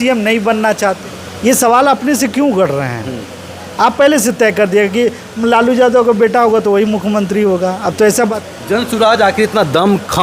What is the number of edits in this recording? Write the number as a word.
two